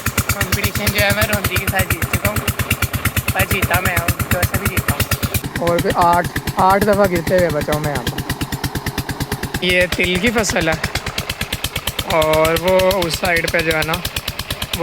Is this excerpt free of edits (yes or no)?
no